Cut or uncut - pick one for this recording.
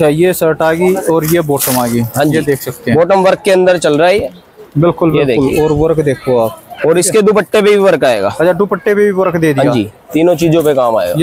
uncut